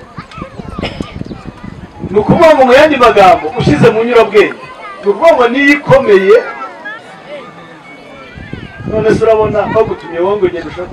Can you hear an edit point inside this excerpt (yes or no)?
yes